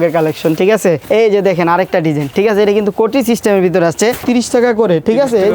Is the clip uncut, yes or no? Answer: no